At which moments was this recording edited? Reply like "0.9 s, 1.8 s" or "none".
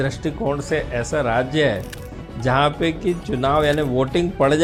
none